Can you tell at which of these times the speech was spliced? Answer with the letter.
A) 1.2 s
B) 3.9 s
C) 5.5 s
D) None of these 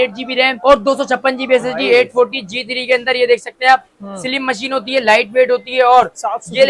D